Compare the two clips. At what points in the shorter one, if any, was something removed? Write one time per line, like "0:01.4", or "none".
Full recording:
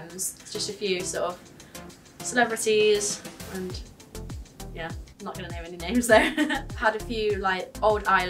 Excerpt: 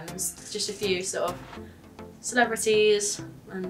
none